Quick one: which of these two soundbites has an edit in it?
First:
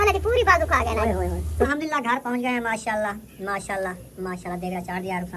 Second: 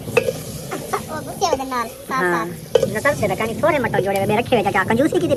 first; 1 cut; at 1.7 s

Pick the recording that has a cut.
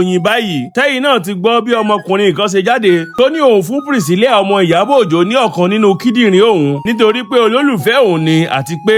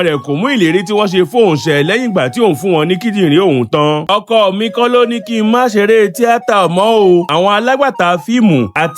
second; 1 cut; at 4.0 s

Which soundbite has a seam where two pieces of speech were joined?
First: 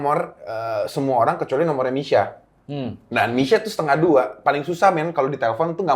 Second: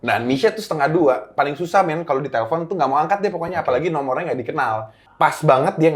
second; 1 cut; at 5.0 s

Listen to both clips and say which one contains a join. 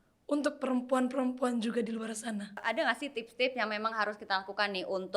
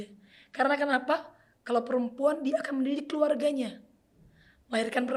first; 1 cut; at 2.6 s

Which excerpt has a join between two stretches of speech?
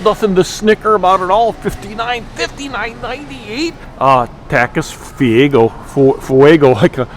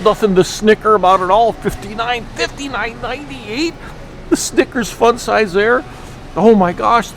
first; 1 cut; at 3.8 s

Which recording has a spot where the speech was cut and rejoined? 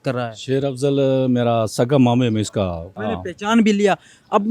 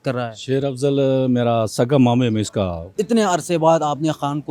second; 1 cut; at 2.9 s

